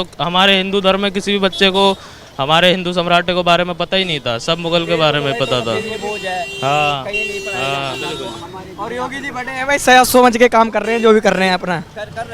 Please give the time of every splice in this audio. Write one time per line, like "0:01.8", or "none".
none